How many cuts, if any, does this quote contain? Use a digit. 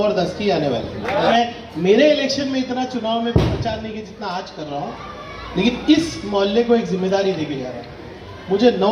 1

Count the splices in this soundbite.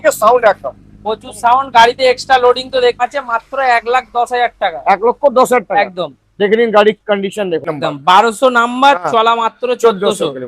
2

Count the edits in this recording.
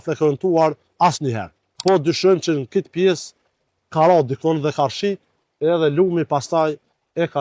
1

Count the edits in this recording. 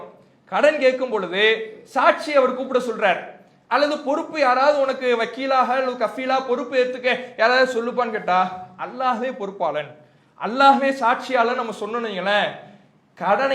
0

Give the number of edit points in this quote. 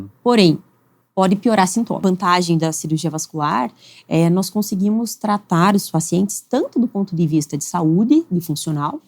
1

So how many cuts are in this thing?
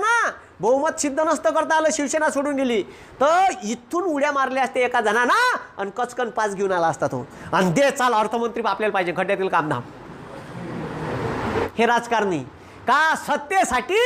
1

